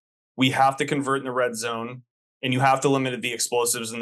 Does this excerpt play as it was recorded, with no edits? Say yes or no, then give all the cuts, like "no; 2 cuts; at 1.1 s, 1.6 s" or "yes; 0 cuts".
yes; 0 cuts